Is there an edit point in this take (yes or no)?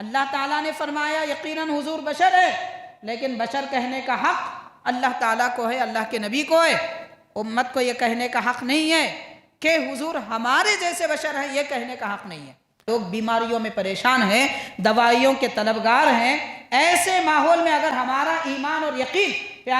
yes